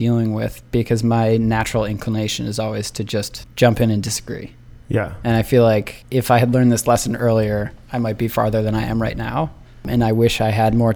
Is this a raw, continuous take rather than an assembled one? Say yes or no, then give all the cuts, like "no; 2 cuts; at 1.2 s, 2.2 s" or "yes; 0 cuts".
no; 3 cuts; at 3.4 s, 6.0 s, 9.9 s